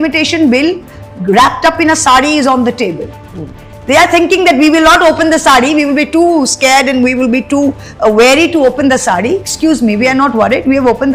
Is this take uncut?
yes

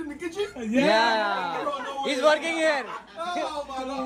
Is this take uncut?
yes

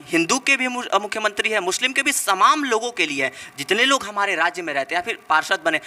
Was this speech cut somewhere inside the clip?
no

